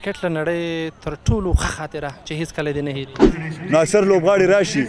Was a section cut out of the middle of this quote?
yes; 1 cut; at 3.2 s

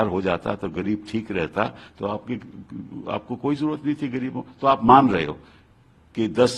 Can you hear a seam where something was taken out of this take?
no; 0 cuts

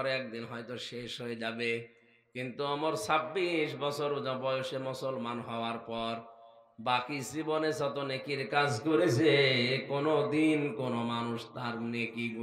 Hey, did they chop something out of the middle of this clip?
no; 0 cuts

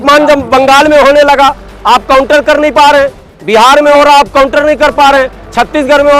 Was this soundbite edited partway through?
no; 0 cuts

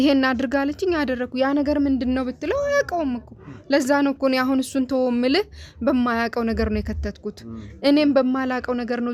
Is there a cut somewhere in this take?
no; 0 cuts

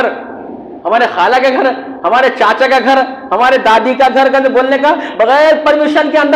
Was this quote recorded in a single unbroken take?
yes; 0 cuts

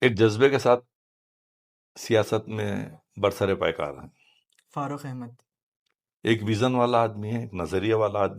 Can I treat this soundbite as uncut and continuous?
yes; 0 cuts

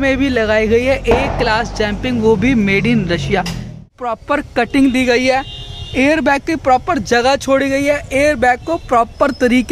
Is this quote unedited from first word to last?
no; 1 cut; at 4.0 s

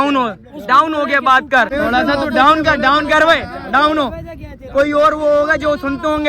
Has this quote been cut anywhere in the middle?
yes; 1 cut; at 1.7 s

